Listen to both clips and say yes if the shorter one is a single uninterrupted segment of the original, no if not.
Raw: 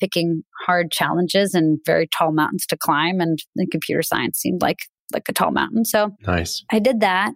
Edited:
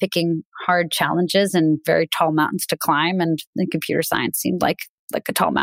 yes